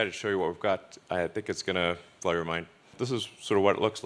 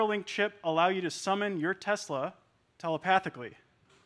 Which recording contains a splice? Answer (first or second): first